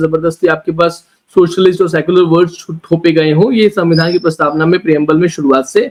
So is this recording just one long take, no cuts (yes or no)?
yes